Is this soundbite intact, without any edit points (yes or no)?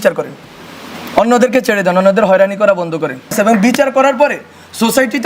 no